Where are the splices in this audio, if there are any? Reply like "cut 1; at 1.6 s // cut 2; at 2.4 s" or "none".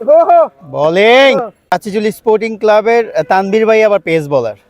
cut 1; at 1.7 s